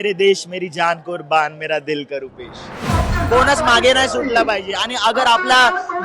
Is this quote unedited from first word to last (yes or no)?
no